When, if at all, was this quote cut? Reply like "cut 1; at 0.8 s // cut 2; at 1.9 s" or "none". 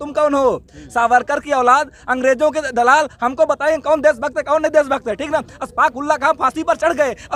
none